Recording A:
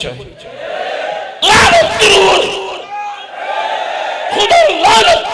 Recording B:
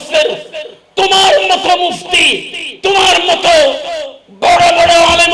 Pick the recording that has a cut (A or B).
A